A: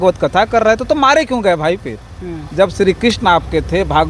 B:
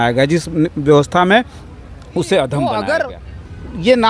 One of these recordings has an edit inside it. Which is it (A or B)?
B